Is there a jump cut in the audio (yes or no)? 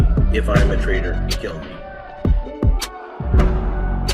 yes